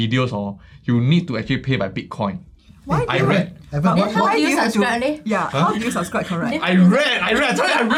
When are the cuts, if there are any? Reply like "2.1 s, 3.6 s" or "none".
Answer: none